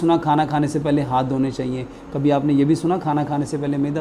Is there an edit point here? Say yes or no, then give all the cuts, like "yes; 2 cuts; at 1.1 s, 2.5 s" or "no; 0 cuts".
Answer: no; 0 cuts